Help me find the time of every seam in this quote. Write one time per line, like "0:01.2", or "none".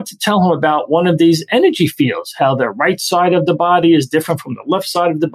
none